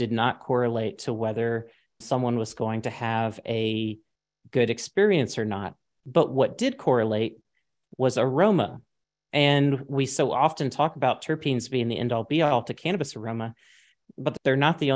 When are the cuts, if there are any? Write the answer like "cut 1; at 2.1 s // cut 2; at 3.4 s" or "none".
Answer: cut 1; at 2.0 s // cut 2; at 14.2 s